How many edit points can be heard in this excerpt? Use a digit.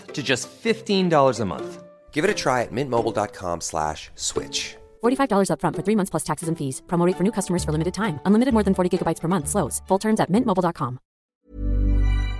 1